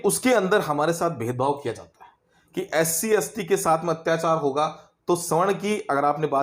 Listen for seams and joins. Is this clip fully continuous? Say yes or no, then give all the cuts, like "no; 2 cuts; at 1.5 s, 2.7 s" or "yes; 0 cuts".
yes; 0 cuts